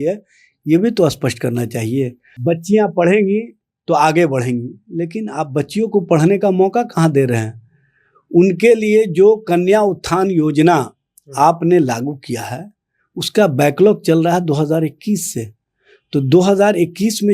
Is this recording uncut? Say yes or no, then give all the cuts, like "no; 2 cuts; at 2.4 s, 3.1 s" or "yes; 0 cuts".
no; 1 cut; at 2.2 s